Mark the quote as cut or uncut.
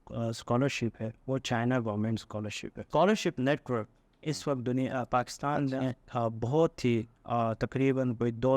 cut